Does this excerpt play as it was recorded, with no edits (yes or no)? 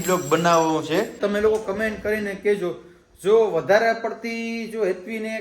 no